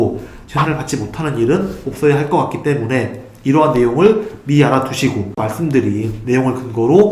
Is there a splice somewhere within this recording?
yes; 1 cut; at 5.4 s

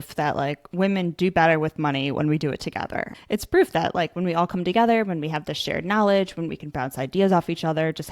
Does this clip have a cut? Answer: yes; 1 cut; at 3.1 s

